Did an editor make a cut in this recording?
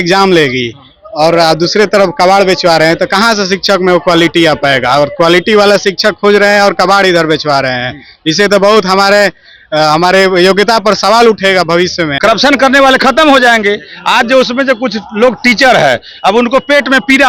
yes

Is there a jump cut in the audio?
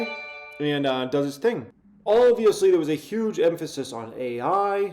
yes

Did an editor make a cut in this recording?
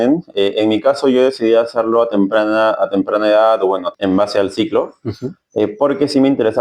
yes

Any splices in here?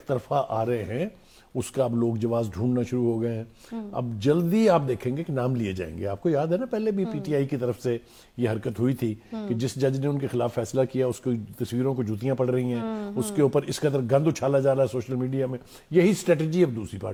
no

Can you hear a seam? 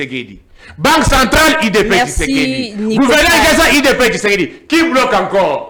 no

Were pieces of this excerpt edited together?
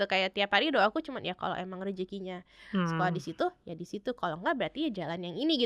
no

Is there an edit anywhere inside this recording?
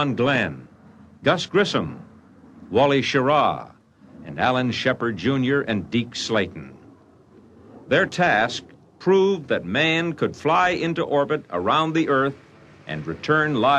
yes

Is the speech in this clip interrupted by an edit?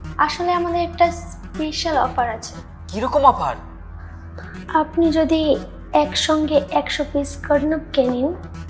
yes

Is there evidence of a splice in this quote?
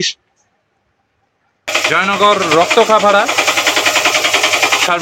yes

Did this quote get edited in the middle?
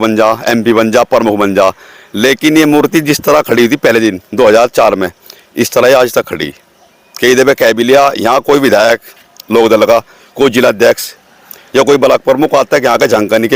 no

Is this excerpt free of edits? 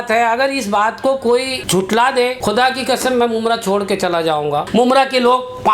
no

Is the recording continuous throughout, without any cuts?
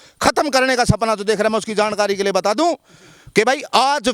yes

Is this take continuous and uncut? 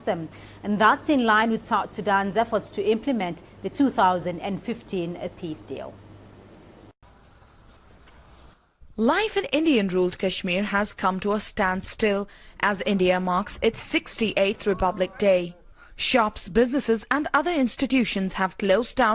no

